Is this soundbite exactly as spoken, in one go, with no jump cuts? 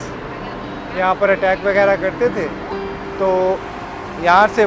yes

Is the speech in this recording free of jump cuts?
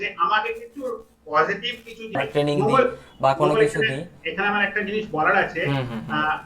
no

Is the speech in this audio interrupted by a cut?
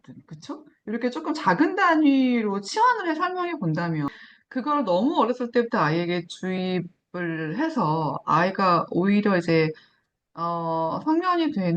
yes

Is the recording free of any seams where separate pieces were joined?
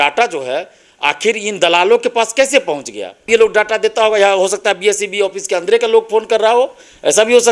no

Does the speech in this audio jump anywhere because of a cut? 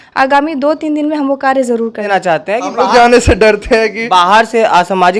yes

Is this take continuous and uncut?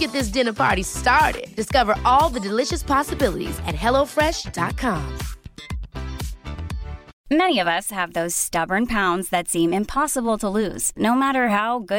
no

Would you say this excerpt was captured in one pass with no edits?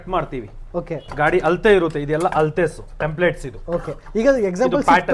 yes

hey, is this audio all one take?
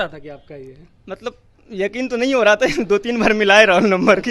yes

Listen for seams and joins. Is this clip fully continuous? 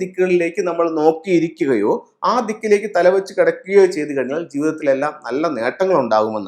yes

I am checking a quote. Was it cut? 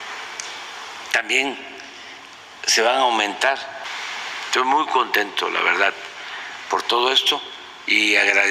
yes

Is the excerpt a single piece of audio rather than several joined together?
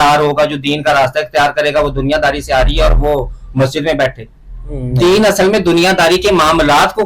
yes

